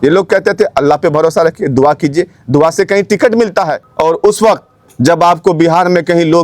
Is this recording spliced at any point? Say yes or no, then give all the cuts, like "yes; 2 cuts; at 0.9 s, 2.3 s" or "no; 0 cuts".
yes; 1 cut; at 3.8 s